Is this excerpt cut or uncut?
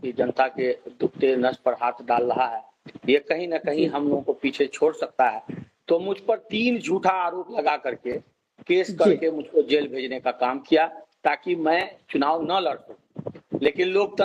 uncut